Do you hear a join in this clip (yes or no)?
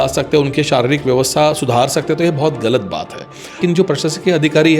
yes